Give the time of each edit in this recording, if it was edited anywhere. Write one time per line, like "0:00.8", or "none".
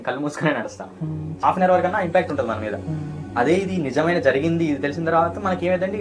0:01.4